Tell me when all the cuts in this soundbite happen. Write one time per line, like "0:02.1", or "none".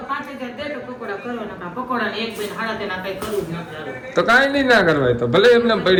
none